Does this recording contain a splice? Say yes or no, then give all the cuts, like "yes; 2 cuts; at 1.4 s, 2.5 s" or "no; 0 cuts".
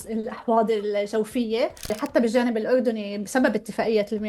yes; 1 cut; at 2.0 s